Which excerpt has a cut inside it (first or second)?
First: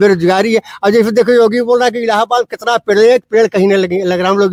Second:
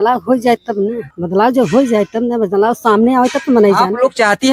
second